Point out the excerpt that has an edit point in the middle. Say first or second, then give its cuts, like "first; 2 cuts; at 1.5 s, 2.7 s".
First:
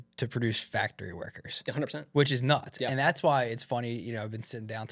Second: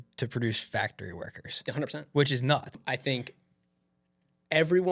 second; 1 cut; at 2.7 s